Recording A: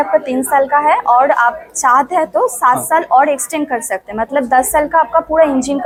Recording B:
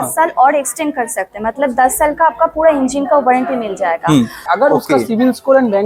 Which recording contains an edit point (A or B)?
B